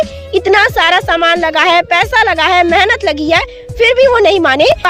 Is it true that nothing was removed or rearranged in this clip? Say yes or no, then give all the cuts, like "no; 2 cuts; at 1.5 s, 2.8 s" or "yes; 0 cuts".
yes; 0 cuts